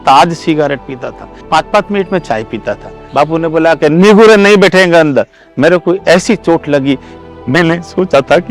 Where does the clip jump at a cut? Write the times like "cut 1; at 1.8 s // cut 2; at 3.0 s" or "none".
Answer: cut 1; at 1.4 s // cut 2; at 3.0 s // cut 3; at 7.1 s